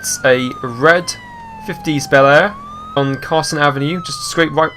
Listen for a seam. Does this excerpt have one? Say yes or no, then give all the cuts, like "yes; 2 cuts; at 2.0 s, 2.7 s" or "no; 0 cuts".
yes; 1 cut; at 3.0 s